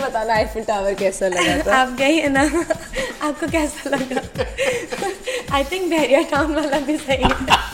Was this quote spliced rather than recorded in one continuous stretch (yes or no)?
no